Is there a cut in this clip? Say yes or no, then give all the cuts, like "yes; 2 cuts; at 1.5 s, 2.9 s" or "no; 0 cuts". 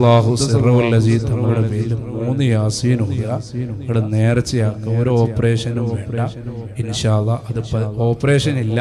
no; 0 cuts